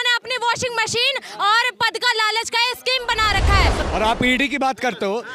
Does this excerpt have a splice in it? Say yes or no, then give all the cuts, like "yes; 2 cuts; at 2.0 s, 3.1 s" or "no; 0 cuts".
yes; 1 cut; at 3.8 s